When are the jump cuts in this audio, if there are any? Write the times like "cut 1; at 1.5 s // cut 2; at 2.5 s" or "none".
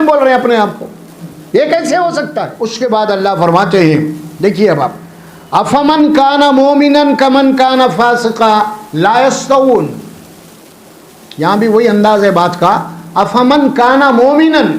cut 1; at 2.5 s